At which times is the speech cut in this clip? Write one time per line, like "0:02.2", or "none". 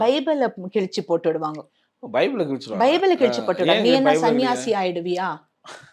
none